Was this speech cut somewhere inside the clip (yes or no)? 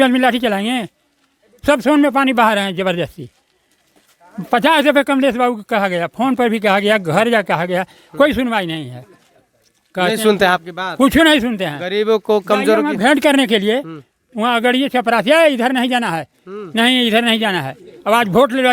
no